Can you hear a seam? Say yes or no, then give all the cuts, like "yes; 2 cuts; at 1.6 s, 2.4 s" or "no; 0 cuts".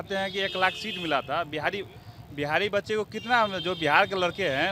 no; 0 cuts